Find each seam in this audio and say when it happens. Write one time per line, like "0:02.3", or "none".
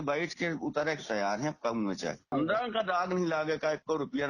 0:02.3